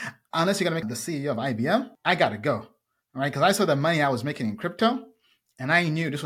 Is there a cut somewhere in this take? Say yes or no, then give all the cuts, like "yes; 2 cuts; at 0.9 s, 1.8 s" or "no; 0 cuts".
yes; 2 cuts; at 0.8 s, 1.9 s